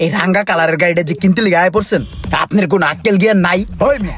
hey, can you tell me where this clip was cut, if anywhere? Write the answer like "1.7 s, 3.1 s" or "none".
3.3 s